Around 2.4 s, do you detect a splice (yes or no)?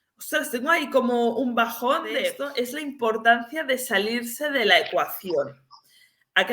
yes